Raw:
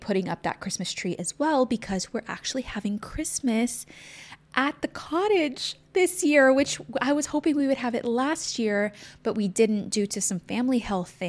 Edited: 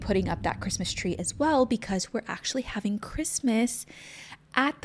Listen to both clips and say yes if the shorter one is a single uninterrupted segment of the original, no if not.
yes